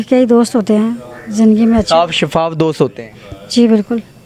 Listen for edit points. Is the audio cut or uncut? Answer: uncut